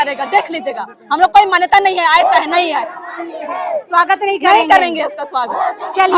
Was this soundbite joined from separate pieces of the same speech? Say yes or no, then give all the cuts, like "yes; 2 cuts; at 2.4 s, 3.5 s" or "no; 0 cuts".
no; 0 cuts